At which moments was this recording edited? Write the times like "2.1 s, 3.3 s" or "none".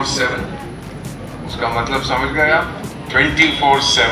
none